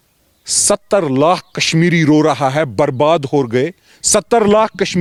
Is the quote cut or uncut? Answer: uncut